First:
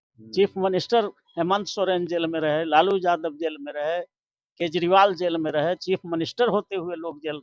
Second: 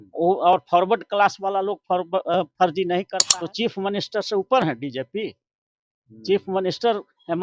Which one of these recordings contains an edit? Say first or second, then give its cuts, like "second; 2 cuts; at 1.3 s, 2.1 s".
second; 1 cut; at 3.2 s